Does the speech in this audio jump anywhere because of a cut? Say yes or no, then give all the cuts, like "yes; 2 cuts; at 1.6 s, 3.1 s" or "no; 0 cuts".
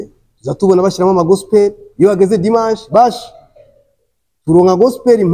no; 0 cuts